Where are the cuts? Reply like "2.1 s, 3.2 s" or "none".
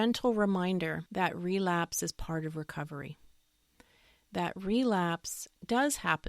1.0 s